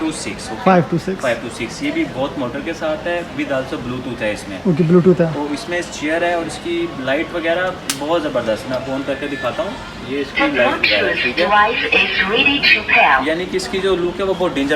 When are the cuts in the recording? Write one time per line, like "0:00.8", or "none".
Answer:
none